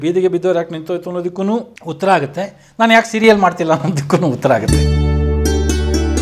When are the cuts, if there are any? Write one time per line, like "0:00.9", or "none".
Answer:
0:01.8
0:04.7